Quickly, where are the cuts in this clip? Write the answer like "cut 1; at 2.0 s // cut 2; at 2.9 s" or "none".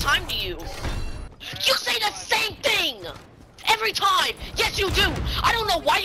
cut 1; at 1.3 s